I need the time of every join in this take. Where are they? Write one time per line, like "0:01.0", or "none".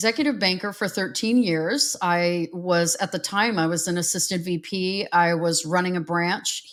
none